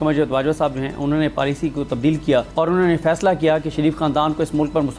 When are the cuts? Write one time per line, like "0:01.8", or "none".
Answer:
0:02.5